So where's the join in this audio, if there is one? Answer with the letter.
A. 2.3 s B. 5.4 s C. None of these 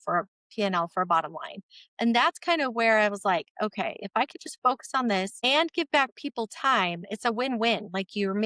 B